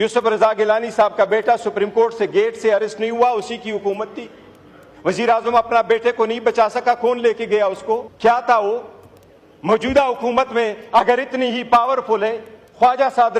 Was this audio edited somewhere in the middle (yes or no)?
yes